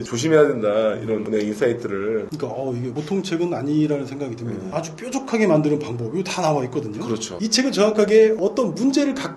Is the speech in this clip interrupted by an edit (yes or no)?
yes